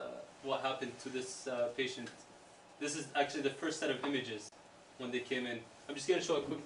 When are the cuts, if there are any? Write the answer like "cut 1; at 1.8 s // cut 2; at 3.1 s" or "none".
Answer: cut 1; at 4.1 s